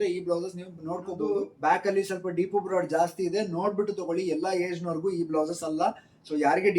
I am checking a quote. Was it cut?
yes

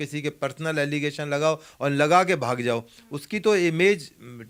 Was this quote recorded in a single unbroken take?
yes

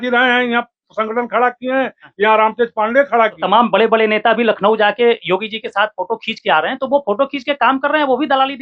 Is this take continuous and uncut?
no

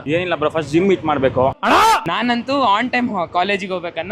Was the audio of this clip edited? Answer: yes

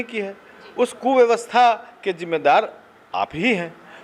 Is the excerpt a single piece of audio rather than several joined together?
yes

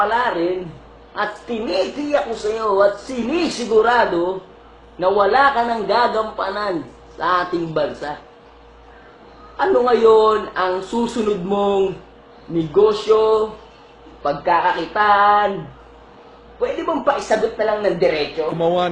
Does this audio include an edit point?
no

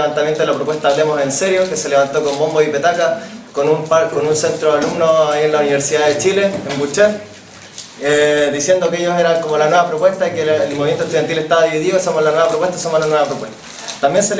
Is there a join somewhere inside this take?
no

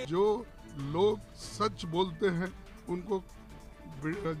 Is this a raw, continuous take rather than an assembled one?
yes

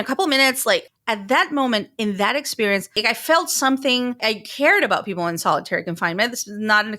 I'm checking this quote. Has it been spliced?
yes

